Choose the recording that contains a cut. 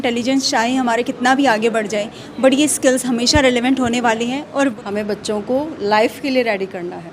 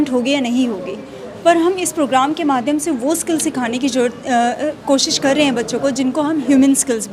first; 1 cut; at 4.7 s

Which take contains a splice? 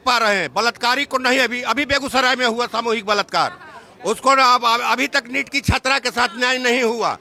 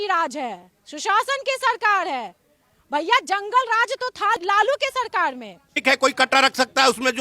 second; 2 cuts; at 4.4 s, 5.8 s

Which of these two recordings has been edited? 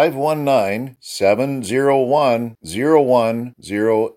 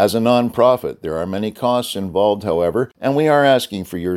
second; 1 cut; at 2.9 s

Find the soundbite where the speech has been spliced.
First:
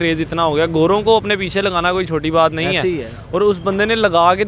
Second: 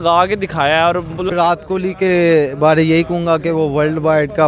second; 1 cut; at 1.3 s

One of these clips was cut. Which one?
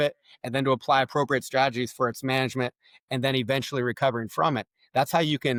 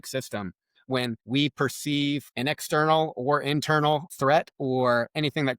second; 3 cuts; at 1.2 s, 2.3 s, 4.1 s

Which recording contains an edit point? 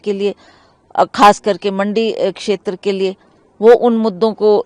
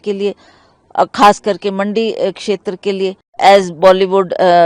second; 1 cut; at 3.4 s

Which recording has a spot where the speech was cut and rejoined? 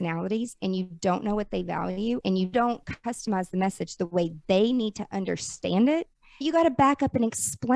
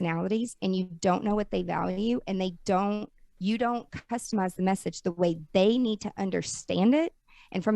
first; 2 cuts; at 2.4 s, 6.4 s

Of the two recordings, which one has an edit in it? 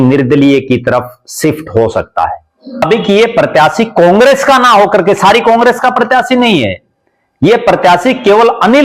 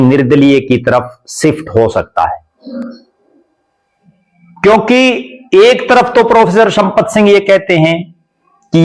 first; 1 cut; at 2.8 s

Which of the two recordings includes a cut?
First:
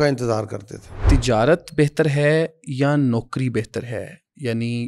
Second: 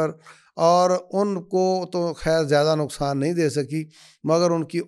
first; 1 cut; at 0.9 s

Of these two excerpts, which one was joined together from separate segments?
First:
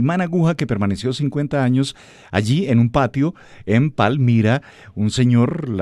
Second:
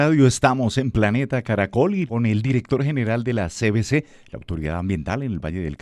second; 1 cut; at 2.1 s

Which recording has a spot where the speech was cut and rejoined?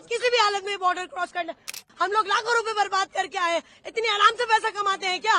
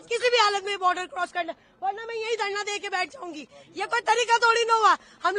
first; 1 cut; at 1.8 s

